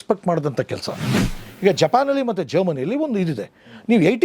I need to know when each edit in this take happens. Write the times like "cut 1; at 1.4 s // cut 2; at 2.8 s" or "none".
cut 1; at 1.3 s

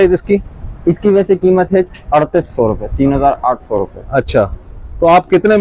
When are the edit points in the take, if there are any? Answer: none

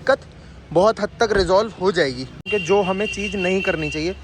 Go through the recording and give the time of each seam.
cut 1; at 2.5 s

